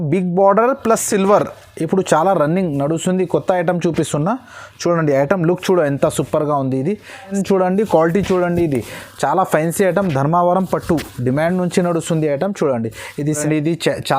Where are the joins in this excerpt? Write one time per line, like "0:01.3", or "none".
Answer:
0:07.3
0:13.4